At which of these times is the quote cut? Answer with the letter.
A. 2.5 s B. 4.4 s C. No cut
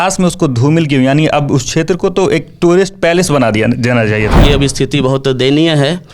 B